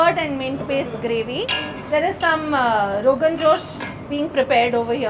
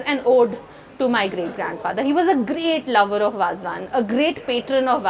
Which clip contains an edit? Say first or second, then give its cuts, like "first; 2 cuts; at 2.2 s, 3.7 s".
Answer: first; 1 cut; at 1.4 s